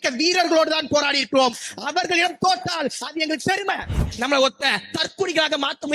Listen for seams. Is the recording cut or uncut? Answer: cut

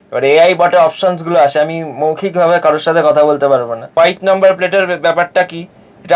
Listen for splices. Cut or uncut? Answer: cut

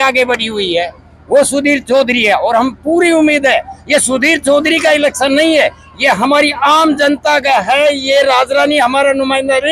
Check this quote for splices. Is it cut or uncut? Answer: uncut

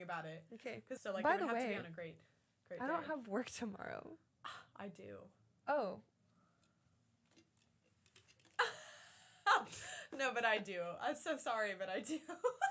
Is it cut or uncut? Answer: cut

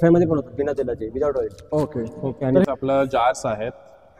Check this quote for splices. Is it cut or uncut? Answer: cut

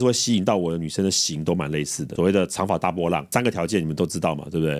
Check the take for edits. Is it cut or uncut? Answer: cut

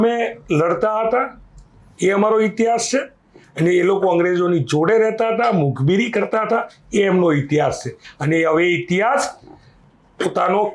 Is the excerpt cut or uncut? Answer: uncut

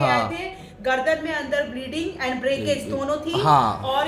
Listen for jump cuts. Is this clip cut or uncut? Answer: uncut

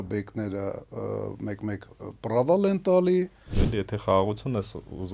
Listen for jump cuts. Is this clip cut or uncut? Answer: cut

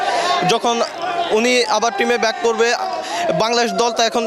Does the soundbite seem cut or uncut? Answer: uncut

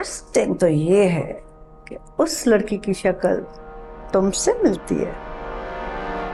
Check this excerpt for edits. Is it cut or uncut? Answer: uncut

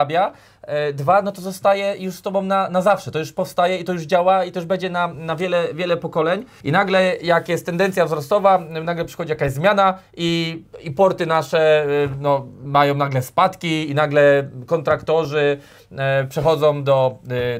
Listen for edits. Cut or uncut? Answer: cut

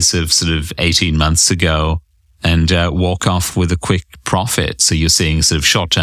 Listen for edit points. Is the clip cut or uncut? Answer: uncut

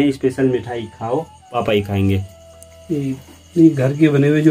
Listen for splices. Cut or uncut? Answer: cut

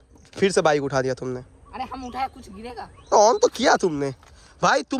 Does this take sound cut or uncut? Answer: cut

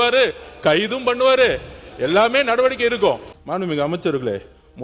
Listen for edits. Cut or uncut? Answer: cut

